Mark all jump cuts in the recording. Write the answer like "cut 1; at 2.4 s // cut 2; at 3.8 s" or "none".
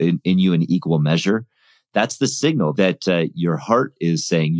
cut 1; at 2.7 s